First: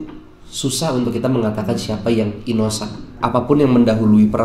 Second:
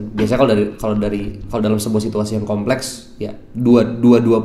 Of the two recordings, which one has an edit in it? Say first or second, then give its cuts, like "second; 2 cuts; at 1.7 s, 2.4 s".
first; 1 cut; at 3.1 s